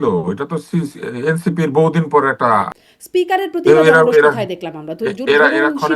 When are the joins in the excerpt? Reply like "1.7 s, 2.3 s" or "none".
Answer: 2.7 s